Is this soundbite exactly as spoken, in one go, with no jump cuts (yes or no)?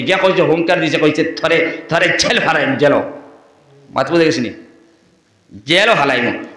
yes